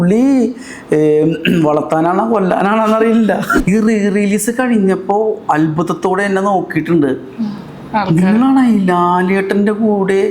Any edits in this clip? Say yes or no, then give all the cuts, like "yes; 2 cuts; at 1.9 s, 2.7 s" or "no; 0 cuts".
yes; 1 cut; at 3.5 s